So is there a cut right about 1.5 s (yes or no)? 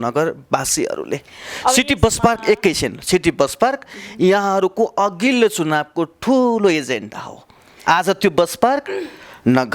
no